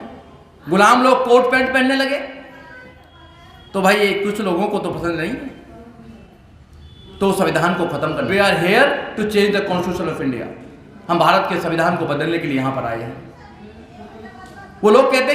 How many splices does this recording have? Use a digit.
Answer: 1